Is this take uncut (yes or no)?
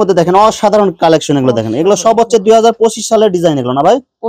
yes